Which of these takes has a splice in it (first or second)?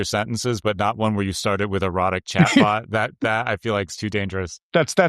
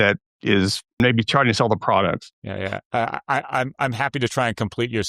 second